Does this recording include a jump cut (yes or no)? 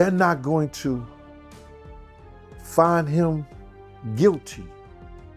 no